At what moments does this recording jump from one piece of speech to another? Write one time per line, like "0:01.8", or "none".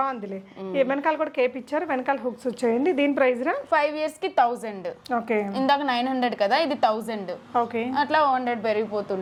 none